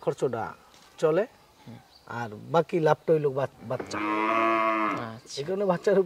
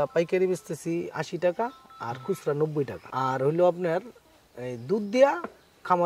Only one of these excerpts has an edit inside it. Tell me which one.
second; 1 cut; at 3.0 s

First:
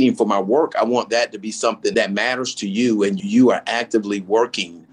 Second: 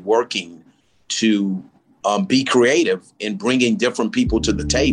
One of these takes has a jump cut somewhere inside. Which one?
first; 2 cuts; at 1.9 s, 3.2 s

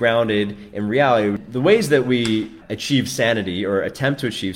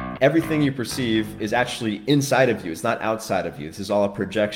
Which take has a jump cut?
first; 2 cuts; at 1.4 s, 2.7 s

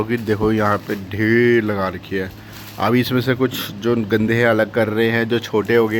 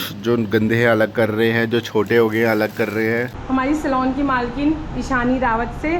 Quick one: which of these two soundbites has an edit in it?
second; 1 cut; at 3.3 s

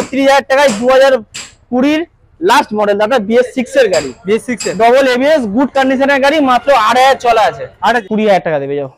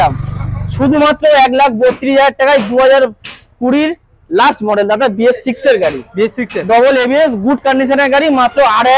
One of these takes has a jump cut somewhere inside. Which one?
first; 1 cut; at 8.0 s

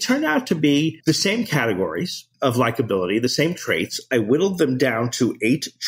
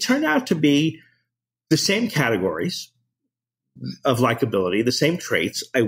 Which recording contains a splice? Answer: first; 2 cuts; at 1.0 s, 2.2 s

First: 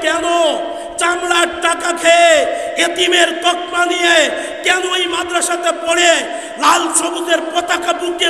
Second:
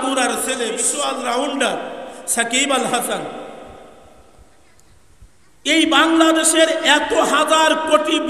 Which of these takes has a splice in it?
second; 1 cut; at 0.9 s

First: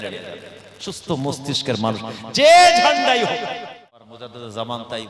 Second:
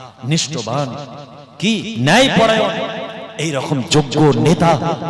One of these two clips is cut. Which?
first; 1 cut; at 4.1 s

